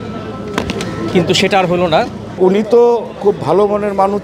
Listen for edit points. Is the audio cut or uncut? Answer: cut